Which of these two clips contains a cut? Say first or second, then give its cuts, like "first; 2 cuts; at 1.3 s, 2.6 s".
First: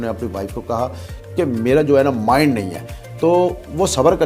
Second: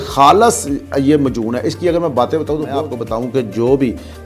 second; 1 cut; at 2.9 s